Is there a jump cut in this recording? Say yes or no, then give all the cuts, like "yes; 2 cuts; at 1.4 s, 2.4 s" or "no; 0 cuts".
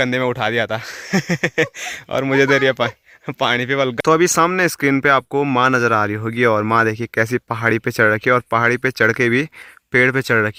no; 0 cuts